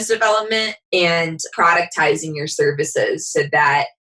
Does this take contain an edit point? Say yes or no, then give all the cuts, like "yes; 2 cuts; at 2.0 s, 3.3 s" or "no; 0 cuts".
yes; 1 cut; at 1.4 s